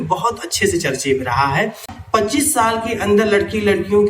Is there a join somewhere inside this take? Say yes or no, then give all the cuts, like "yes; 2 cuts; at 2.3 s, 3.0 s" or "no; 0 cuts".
yes; 1 cut; at 1.9 s